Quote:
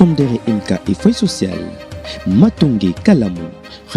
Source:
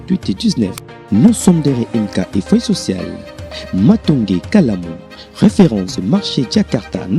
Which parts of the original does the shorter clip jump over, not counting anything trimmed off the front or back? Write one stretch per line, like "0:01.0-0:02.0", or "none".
none